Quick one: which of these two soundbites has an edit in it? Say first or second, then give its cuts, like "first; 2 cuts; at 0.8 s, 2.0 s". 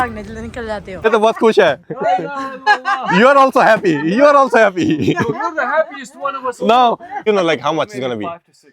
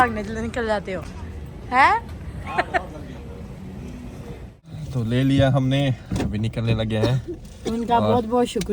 first; 2 cuts; at 1.0 s, 7.2 s